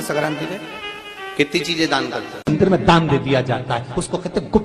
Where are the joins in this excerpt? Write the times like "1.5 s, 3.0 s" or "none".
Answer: 2.6 s